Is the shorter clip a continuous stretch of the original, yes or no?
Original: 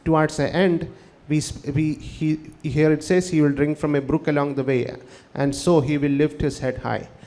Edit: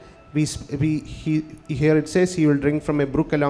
yes